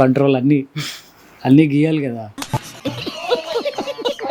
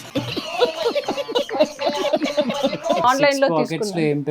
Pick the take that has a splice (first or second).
second